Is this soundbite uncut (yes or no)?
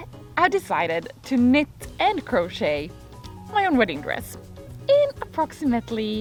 yes